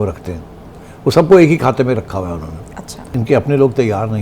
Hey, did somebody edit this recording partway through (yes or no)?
yes